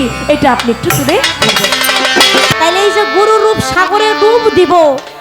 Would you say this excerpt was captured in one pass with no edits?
no; 1 cut; at 2.5 s

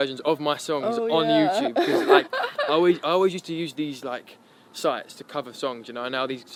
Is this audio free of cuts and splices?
yes; 0 cuts

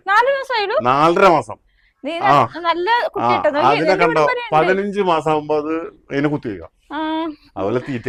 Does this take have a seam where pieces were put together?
no; 0 cuts

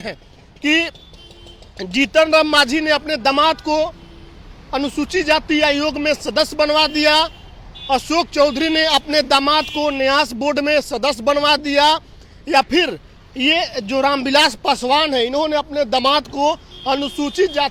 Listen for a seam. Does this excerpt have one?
no; 0 cuts

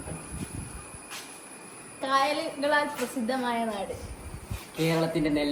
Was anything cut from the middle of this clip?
no; 0 cuts

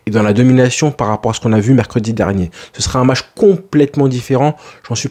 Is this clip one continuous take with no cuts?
yes; 0 cuts

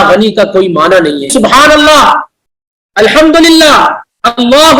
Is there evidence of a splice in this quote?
yes; 1 cut; at 1.3 s

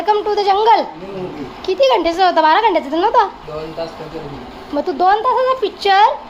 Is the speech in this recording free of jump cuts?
yes; 0 cuts

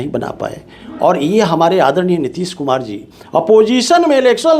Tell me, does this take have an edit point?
no; 0 cuts

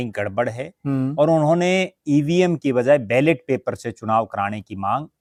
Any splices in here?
no; 0 cuts

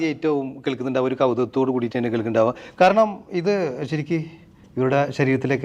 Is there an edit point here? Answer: no; 0 cuts

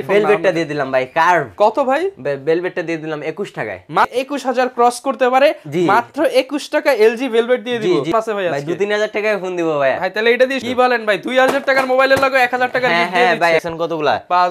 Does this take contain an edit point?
yes; 4 cuts; at 4.1 s, 8.1 s, 10.6 s, 13.6 s

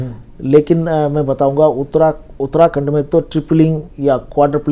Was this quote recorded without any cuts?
yes; 0 cuts

